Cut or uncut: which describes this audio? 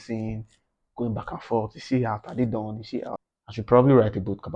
cut